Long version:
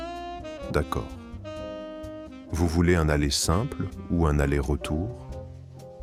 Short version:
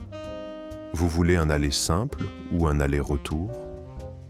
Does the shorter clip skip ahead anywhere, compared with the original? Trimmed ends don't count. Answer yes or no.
yes